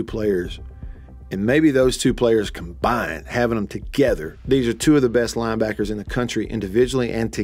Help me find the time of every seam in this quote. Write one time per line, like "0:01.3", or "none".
0:04.3